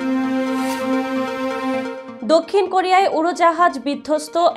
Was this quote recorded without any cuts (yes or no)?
yes